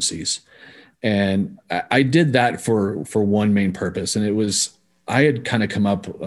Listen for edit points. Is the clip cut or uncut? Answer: uncut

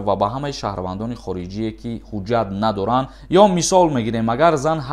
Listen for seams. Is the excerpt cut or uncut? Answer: cut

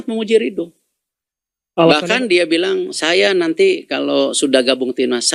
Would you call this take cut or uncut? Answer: uncut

